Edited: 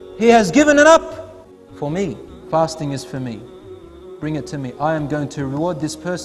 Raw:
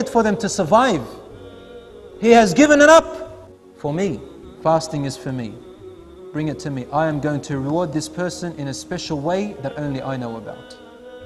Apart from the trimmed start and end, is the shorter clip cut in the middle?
yes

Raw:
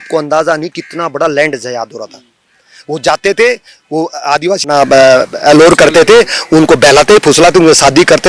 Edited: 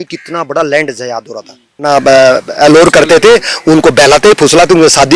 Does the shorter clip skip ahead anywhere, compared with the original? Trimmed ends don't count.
yes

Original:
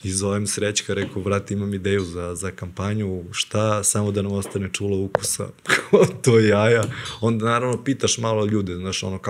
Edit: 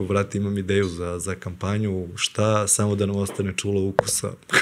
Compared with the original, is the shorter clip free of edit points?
yes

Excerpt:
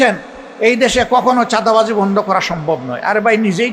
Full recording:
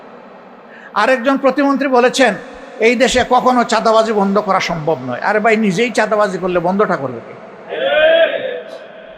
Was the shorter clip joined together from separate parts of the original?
no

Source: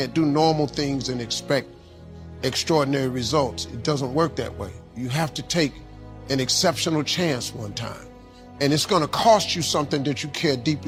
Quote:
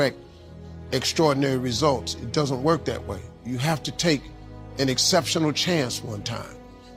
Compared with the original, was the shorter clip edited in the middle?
no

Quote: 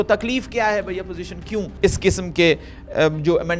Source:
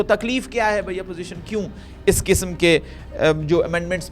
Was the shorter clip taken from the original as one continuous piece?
no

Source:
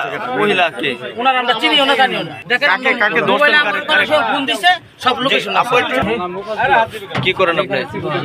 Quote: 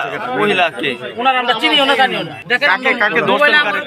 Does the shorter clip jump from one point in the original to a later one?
no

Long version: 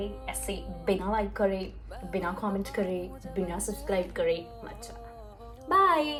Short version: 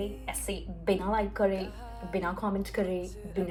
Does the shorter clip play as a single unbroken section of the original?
yes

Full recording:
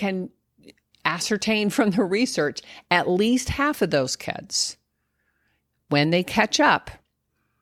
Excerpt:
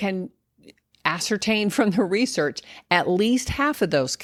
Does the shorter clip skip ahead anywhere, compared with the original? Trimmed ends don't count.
no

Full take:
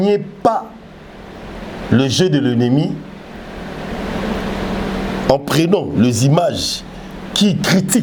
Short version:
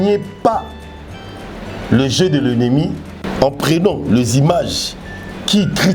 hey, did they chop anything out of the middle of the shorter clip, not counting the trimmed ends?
yes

